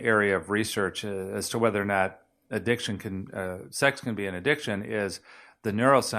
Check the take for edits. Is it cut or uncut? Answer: uncut